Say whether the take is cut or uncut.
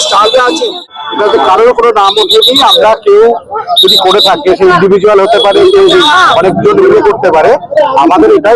cut